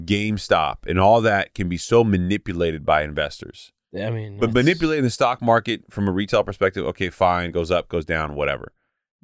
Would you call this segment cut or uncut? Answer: uncut